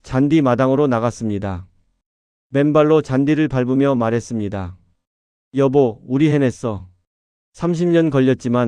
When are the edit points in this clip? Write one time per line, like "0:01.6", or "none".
none